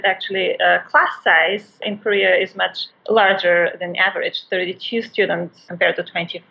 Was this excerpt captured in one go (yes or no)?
no